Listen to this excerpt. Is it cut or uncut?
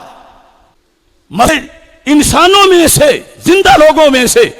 cut